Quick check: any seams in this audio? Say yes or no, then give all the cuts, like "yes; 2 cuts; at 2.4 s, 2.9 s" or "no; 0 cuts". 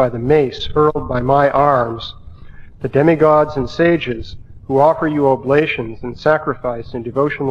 no; 0 cuts